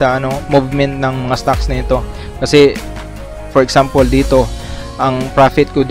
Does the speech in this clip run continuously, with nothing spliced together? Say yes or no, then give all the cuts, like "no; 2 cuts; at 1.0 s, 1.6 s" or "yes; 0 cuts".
yes; 0 cuts